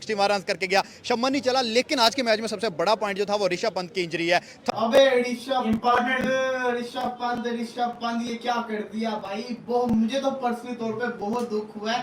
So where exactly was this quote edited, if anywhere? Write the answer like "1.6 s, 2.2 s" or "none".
4.7 s